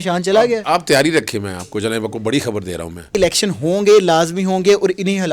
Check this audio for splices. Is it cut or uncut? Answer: cut